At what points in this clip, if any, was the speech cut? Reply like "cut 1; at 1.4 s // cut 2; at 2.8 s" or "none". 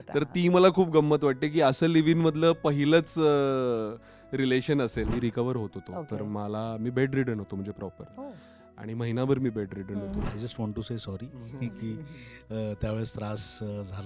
cut 1; at 5.1 s // cut 2; at 10.2 s